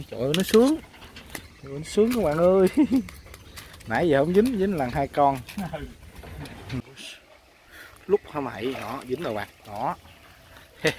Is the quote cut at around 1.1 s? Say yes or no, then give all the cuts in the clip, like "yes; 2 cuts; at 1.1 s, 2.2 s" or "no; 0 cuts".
no; 1 cut; at 6.8 s